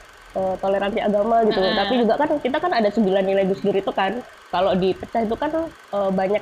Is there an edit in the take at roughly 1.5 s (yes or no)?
no